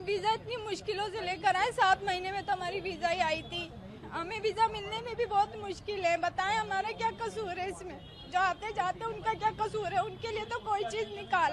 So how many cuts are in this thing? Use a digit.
0